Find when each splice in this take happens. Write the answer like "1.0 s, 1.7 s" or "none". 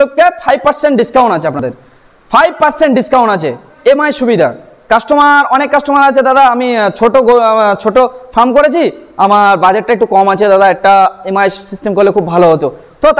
none

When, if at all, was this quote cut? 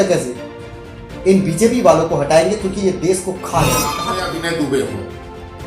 4.0 s

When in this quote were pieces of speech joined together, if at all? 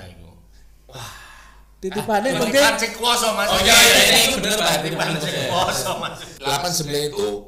6.3 s

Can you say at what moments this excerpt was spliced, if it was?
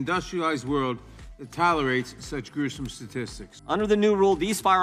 3.5 s

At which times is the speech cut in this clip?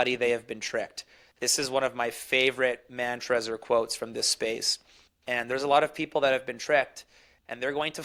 none

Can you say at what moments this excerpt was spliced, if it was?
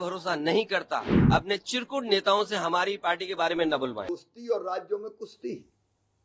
1.1 s, 4.1 s

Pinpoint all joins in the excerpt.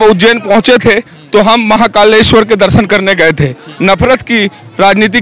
3.6 s

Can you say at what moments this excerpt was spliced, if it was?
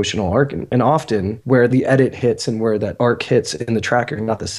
1.6 s, 2.9 s

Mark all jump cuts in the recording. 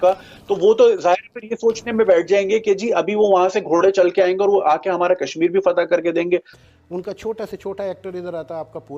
6.5 s

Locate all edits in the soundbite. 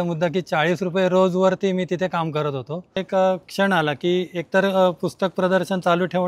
3.0 s

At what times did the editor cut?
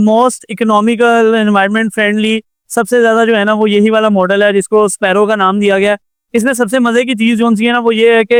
none

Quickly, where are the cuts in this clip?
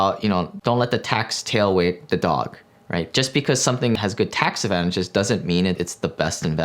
4.0 s, 5.8 s

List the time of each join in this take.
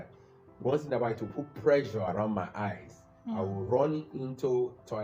none

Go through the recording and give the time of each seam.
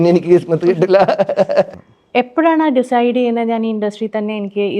1.7 s

